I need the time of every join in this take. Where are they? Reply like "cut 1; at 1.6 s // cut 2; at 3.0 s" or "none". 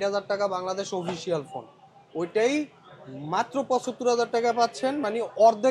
none